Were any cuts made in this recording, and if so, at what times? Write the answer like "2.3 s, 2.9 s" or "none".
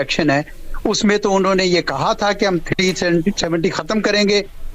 none